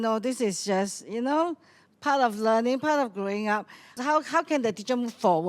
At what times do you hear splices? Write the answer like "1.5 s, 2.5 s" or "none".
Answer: 3.9 s